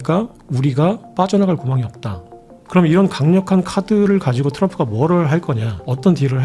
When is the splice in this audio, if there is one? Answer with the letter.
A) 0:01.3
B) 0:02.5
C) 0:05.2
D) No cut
B